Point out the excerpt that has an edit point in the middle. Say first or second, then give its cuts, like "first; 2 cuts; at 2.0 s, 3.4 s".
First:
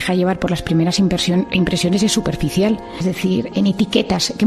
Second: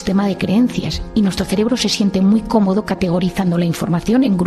first; 1 cut; at 3.0 s